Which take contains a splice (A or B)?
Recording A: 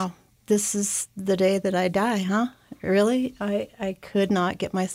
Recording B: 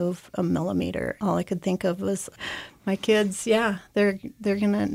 B